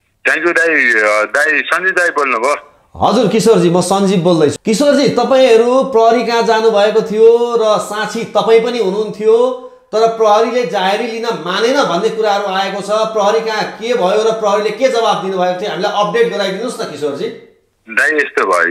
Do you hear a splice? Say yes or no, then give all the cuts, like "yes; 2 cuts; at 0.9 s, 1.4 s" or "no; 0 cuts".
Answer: yes; 1 cut; at 4.6 s